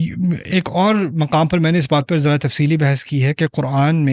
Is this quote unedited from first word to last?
yes; 0 cuts

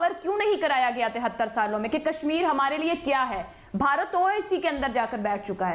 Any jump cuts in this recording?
no; 0 cuts

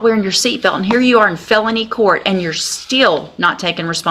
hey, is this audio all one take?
yes; 0 cuts

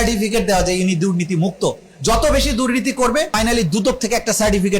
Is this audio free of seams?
no; 1 cut; at 3.3 s

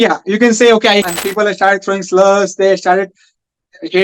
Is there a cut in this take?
yes; 1 cut; at 1.1 s

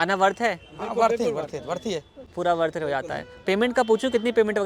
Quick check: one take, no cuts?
yes; 0 cuts

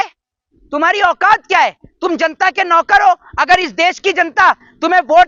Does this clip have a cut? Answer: no; 0 cuts

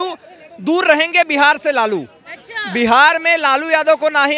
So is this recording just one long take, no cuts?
yes; 0 cuts

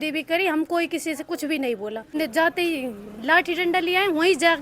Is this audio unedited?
no; 1 cut; at 2.2 s

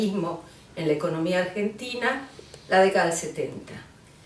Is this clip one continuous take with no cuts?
no; 1 cut; at 1.1 s

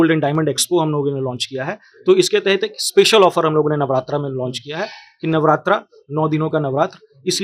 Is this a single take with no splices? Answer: yes; 0 cuts

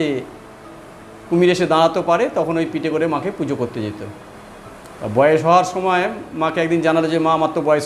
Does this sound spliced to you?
no; 0 cuts

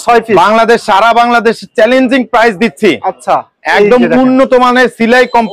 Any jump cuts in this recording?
no; 0 cuts

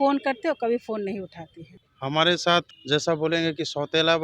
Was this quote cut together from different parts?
yes; 2 cuts; at 1.7 s, 2.7 s

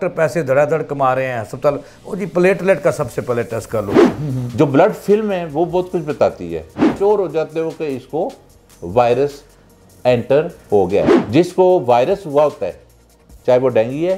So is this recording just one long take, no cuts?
no; 3 cuts; at 4.0 s, 6.9 s, 11.2 s

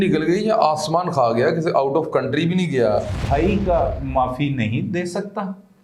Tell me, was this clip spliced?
yes; 1 cut; at 3.2 s

